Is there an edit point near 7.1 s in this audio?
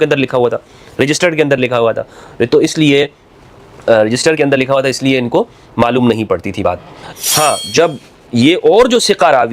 yes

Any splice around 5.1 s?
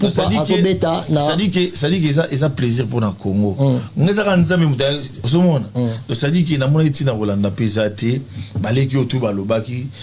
yes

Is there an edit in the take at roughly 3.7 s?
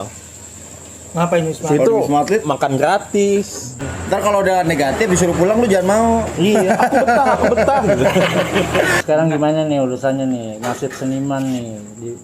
yes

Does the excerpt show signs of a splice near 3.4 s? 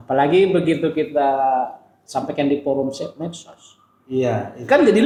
no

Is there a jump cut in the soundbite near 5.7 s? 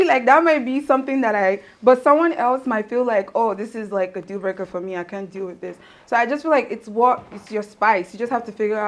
no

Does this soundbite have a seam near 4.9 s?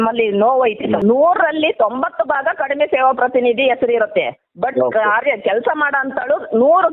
no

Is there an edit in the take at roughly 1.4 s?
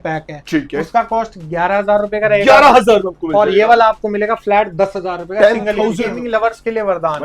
no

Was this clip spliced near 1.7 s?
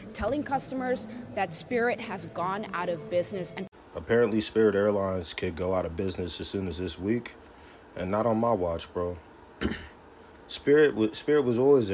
no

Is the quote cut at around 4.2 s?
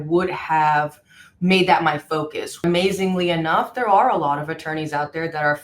no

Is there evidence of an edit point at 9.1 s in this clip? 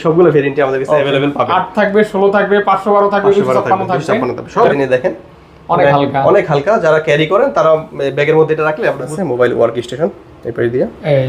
yes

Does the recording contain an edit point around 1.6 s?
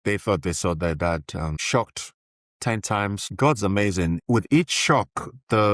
yes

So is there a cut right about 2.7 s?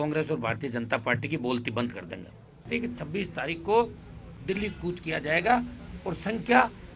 yes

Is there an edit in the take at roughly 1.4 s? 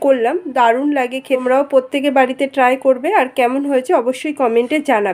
yes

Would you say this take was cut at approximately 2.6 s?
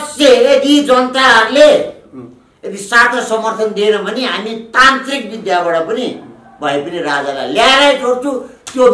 no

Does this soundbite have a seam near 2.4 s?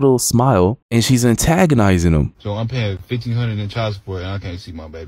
yes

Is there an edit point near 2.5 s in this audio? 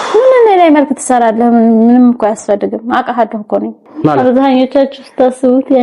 no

